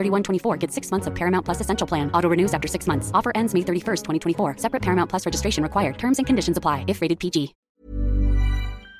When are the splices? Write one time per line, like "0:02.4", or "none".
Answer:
0:07.6